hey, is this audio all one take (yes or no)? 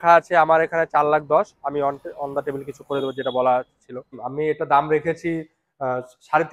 no